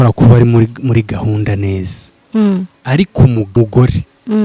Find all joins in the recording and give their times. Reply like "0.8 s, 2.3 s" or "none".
3.5 s